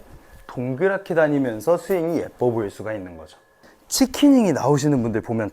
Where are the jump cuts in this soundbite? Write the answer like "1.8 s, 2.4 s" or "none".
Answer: 3.7 s